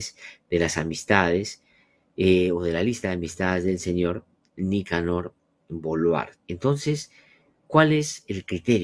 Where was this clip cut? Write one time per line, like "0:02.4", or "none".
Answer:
0:06.4

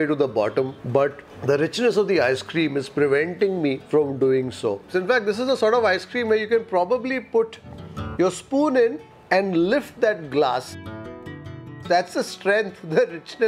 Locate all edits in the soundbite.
0:03.8
0:04.8

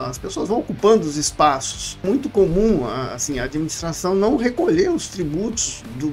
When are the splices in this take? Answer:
0:02.0

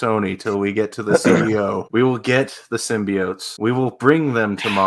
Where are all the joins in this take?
0:01.8
0:03.4

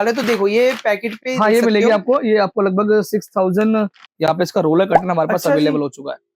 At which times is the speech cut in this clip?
0:04.1

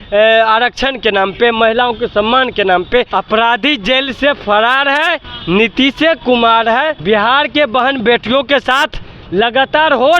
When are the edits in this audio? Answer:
0:03.1
0:07.0

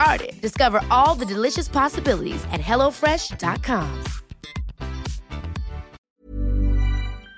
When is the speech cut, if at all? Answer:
0:06.0

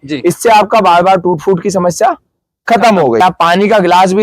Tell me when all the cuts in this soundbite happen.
0:03.2

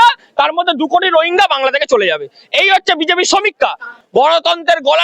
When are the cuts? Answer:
0:03.9

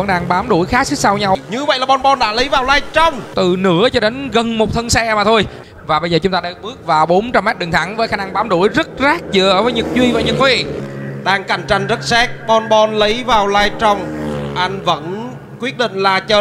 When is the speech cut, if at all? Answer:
0:01.4
0:03.3
0:05.6
0:10.8

